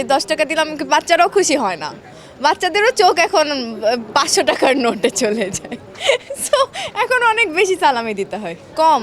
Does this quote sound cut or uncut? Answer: uncut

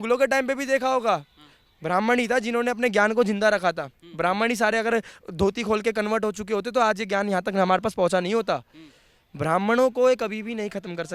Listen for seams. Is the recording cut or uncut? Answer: uncut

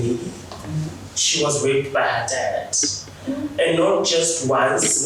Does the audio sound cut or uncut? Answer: uncut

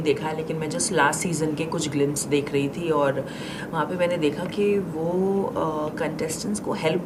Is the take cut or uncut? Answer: uncut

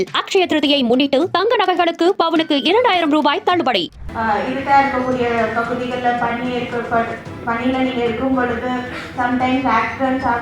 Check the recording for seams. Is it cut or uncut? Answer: cut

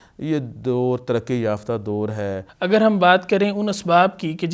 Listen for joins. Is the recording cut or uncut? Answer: cut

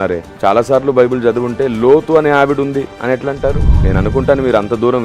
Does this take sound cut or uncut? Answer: cut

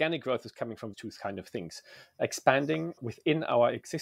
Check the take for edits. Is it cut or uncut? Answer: cut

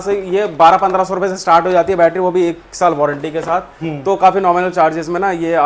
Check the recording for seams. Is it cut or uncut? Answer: uncut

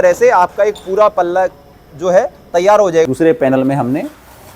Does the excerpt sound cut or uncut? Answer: cut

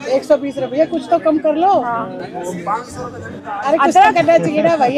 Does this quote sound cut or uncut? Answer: uncut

